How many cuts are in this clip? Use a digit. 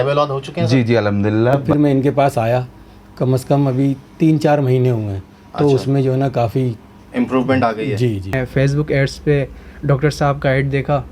2